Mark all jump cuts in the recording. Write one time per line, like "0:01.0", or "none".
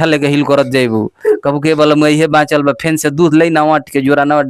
none